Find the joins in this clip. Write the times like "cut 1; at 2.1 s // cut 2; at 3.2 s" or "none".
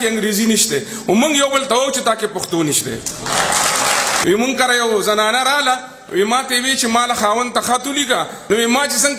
cut 1; at 4.2 s // cut 2; at 8.4 s